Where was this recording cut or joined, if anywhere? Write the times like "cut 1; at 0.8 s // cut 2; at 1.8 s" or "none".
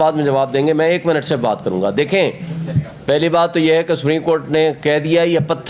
cut 1; at 2.7 s